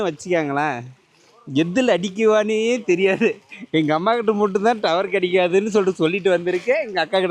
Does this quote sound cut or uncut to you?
uncut